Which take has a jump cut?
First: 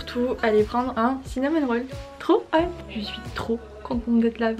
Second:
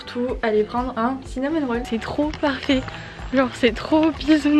second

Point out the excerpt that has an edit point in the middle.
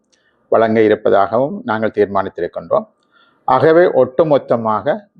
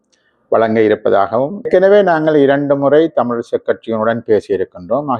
second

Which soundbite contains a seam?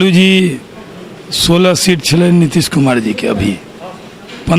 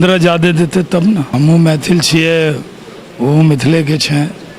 second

